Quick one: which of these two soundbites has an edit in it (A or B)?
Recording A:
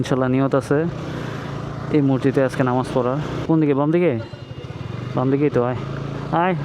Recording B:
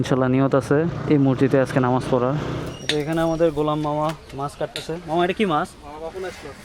B